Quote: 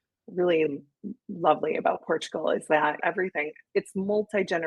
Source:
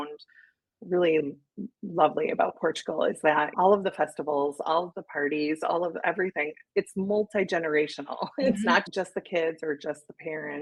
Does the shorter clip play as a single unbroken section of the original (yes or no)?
no